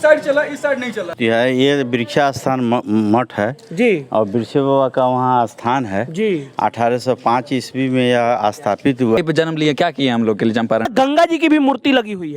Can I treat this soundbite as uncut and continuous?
no; 3 cuts; at 1.1 s, 9.2 s, 10.9 s

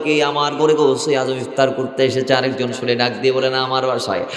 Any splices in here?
no; 0 cuts

